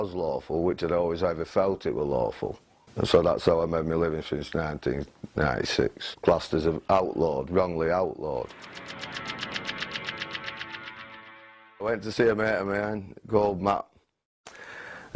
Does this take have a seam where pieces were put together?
no; 0 cuts

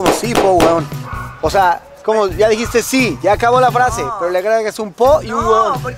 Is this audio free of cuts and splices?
yes; 0 cuts

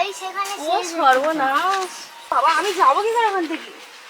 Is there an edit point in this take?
yes; 1 cut; at 2.3 s

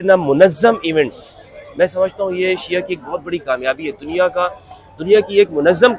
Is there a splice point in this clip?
no; 0 cuts

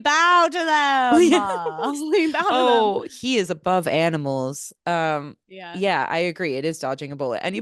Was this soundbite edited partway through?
no; 0 cuts

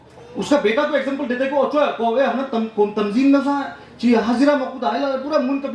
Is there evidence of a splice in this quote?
no; 0 cuts

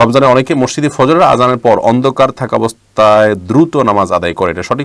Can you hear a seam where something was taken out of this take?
no; 0 cuts

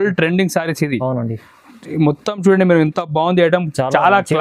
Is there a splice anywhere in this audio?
no; 0 cuts

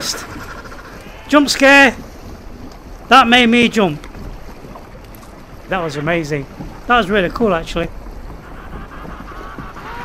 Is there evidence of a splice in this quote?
no; 0 cuts

